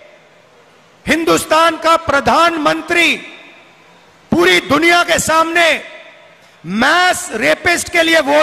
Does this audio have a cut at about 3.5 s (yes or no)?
no